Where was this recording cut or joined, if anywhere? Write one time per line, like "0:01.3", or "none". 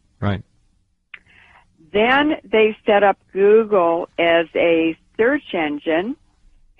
none